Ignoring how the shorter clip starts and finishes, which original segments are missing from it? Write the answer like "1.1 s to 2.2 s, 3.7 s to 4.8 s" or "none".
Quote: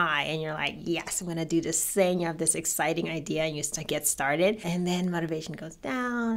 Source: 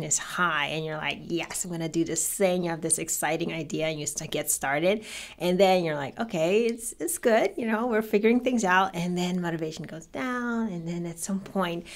5.1 s to 9.0 s

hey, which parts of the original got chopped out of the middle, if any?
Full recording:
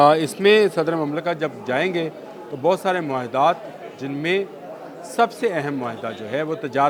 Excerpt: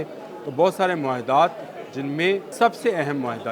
4.5 s to 5.1 s

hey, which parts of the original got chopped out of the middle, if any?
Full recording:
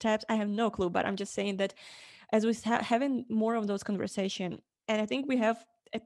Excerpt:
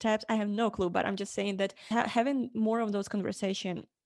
1.9 s to 2.6 s

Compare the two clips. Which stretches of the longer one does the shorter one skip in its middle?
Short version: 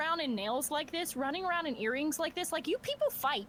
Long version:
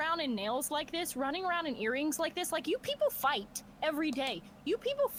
none

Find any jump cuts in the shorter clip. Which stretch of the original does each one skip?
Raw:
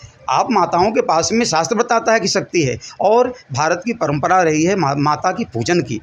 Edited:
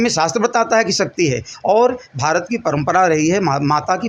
none

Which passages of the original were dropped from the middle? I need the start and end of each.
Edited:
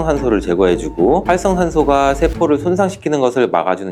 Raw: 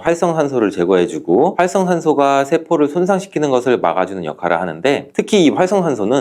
none

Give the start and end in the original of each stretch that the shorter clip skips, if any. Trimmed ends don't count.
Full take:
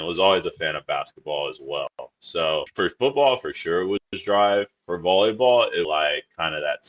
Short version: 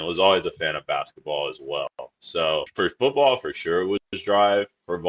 none

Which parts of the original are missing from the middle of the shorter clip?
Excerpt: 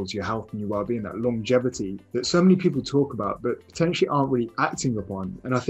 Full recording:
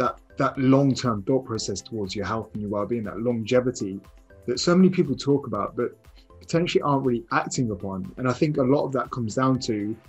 4.0 s to 4.3 s, 6.0 s to 6.4 s

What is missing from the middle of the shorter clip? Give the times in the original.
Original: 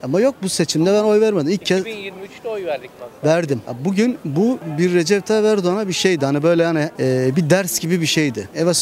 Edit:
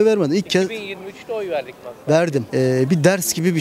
3.6 s to 6.9 s

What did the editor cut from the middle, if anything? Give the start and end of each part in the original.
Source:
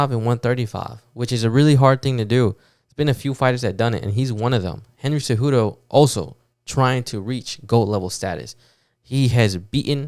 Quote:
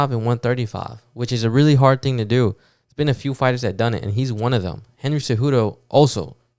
none

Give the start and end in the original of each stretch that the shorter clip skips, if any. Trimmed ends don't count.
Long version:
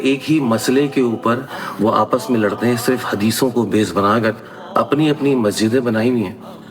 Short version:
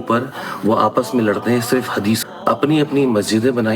3.4 s to 4.5 s

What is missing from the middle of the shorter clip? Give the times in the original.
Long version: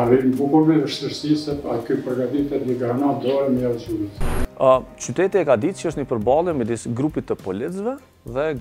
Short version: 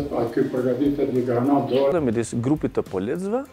3.4 s to 6.4 s

